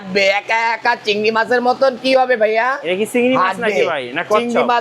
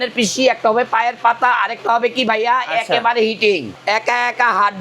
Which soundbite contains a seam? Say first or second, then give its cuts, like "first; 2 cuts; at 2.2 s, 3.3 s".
second; 1 cut; at 3.7 s